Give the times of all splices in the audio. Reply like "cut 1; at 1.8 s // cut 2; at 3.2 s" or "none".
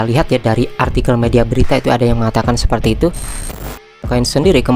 cut 1; at 3.6 s